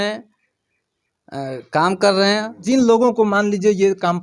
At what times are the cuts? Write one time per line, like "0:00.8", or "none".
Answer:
0:02.5